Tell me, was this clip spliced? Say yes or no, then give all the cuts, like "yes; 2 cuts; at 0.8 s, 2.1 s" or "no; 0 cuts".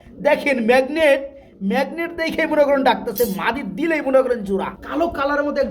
yes; 1 cut; at 4.5 s